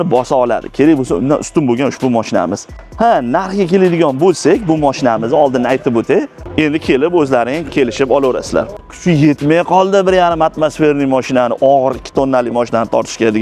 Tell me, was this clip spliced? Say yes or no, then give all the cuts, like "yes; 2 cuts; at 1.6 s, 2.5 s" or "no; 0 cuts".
yes; 2 cuts; at 6.4 s, 8.8 s